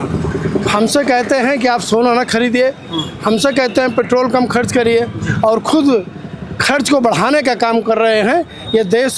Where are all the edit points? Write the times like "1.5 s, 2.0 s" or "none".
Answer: none